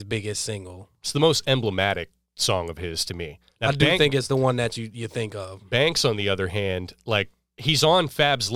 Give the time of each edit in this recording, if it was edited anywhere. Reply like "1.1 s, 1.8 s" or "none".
3.4 s, 7.4 s